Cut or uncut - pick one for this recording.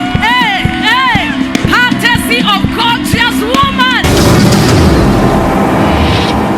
cut